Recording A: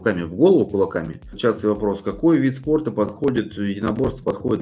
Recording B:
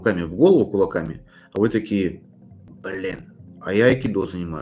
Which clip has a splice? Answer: A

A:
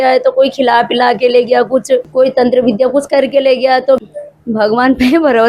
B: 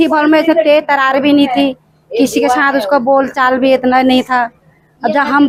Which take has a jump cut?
A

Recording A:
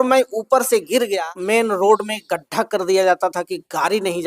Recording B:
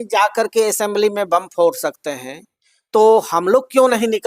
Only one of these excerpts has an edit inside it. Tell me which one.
A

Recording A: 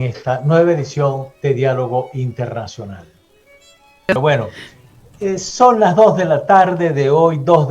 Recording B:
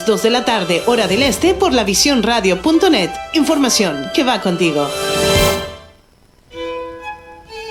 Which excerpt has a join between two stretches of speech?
A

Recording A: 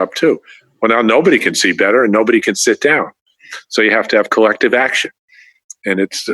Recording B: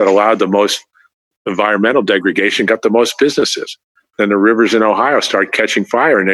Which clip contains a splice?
A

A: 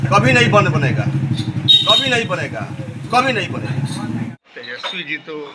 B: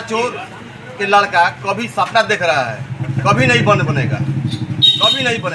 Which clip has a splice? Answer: A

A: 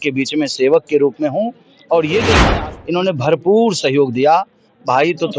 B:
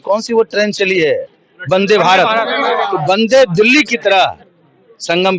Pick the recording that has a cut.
A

